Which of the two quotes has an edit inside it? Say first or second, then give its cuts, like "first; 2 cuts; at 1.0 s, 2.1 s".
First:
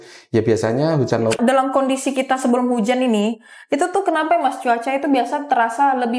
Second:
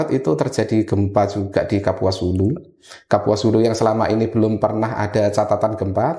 first; 1 cut; at 1.4 s